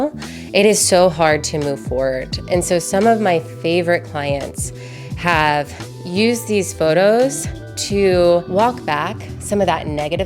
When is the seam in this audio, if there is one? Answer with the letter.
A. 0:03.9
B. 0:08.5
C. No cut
B